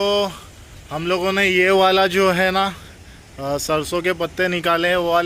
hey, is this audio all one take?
yes; 0 cuts

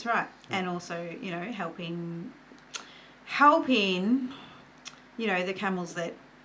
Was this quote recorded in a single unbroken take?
yes; 0 cuts

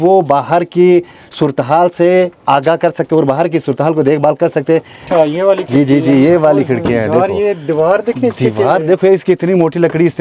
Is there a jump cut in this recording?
yes; 1 cut; at 5.1 s

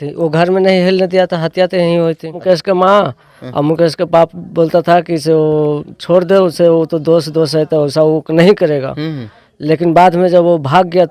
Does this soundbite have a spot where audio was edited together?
yes; 1 cut; at 2.4 s

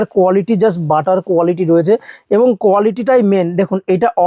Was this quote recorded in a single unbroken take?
yes; 0 cuts

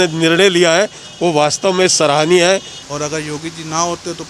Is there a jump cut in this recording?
yes; 1 cut; at 2.7 s

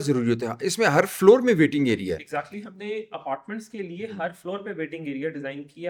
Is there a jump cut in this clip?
no; 0 cuts

